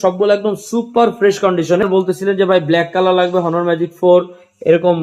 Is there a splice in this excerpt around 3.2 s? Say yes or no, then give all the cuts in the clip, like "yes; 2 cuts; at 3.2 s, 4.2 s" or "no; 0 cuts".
no; 1 cut; at 1.8 s